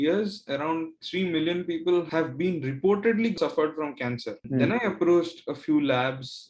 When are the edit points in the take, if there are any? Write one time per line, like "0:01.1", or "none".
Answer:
0:04.4